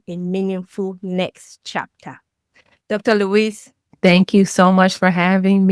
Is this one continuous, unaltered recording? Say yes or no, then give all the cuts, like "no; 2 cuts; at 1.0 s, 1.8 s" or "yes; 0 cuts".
yes; 0 cuts